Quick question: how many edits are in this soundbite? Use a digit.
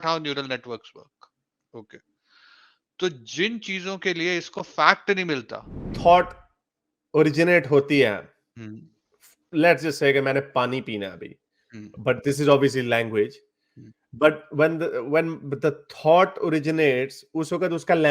1